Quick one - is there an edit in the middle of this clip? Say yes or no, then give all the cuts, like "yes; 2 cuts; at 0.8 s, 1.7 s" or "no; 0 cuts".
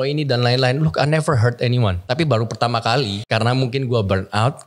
yes; 2 cuts; at 2.0 s, 3.2 s